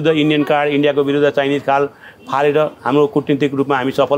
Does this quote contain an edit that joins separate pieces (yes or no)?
no